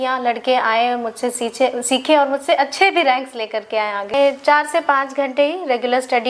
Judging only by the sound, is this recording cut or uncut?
cut